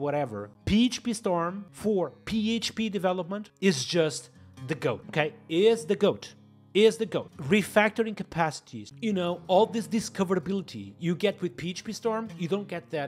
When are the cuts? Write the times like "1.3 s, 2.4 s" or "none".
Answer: none